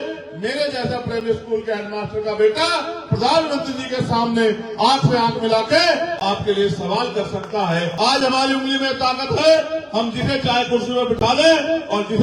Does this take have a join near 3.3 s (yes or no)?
no